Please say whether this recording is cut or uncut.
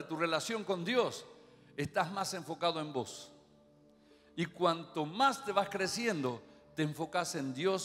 uncut